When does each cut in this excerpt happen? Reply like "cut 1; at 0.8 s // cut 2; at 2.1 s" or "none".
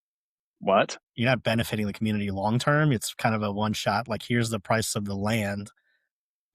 cut 1; at 1.0 s